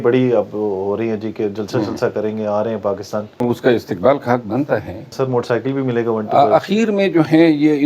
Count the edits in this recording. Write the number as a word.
two